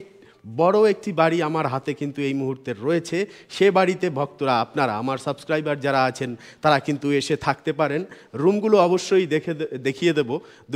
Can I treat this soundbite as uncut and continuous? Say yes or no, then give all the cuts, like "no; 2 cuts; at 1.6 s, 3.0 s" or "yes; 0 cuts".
yes; 0 cuts